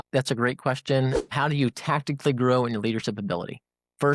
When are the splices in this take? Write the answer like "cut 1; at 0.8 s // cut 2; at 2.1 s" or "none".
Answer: cut 1; at 1.3 s